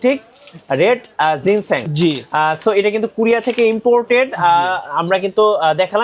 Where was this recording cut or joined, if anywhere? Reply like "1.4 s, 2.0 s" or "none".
none